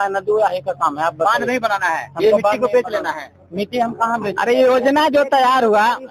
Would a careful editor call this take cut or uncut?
uncut